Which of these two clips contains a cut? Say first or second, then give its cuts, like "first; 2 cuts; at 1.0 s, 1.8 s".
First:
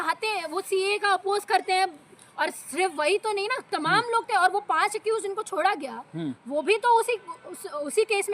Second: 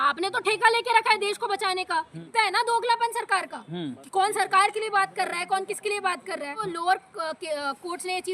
second; 2 cuts; at 2.2 s, 6.6 s